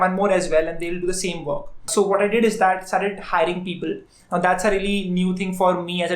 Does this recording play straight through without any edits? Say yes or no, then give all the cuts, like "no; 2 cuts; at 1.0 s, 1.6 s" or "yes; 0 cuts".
no; 1 cut; at 1.9 s